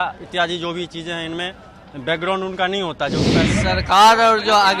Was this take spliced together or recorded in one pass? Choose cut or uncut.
cut